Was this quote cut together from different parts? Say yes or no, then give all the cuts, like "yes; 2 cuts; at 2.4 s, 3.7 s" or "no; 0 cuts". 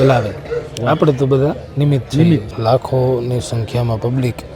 yes; 1 cut; at 2.5 s